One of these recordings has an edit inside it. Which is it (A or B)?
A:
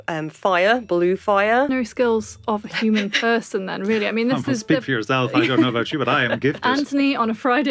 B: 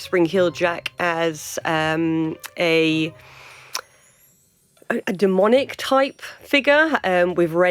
A